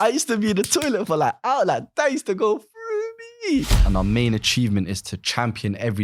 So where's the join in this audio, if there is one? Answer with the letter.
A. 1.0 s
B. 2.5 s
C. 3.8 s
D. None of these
C